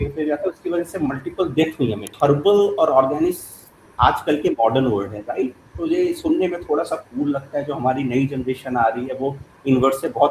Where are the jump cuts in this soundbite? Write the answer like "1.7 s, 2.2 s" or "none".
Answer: 2.1 s